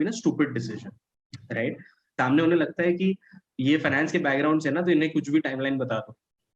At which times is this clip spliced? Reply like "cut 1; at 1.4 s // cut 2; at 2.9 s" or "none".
cut 1; at 2.2 s